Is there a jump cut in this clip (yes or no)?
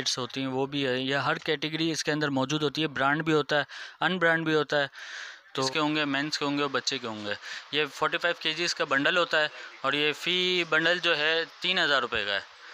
yes